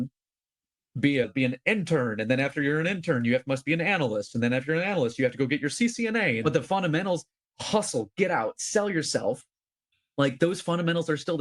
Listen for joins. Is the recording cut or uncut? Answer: cut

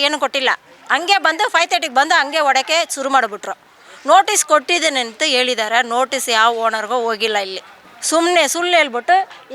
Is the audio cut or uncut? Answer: uncut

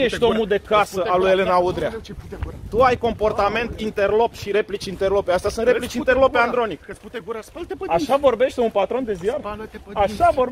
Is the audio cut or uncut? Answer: uncut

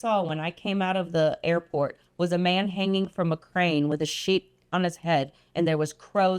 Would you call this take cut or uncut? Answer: uncut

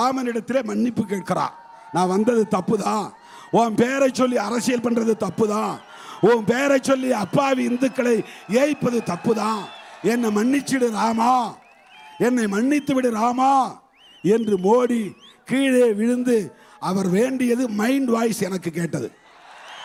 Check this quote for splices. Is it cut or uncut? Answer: uncut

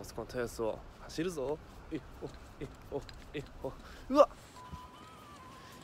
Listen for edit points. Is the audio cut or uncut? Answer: uncut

